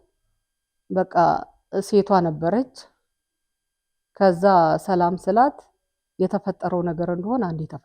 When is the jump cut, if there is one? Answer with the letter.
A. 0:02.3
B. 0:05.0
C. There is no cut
C